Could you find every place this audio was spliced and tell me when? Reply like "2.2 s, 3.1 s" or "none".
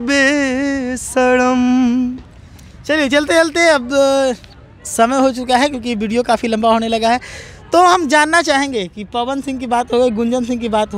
none